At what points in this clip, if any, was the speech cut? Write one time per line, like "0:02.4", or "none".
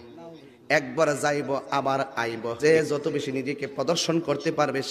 0:02.6